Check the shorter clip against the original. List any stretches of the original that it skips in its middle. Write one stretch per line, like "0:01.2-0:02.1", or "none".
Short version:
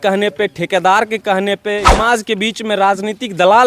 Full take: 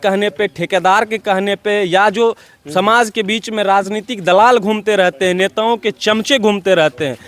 0:01.9-0:02.8